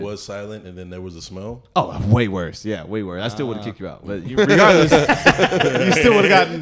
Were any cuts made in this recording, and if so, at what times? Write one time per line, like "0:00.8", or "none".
none